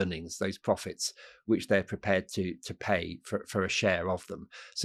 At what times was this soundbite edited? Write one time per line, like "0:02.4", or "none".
none